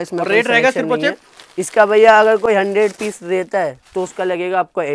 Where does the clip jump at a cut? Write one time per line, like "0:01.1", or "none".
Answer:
none